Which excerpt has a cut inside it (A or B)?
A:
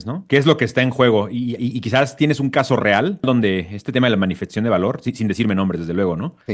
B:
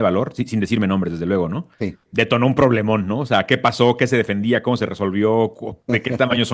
A